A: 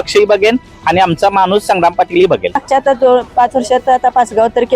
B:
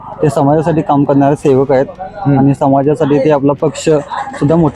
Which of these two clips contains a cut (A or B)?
A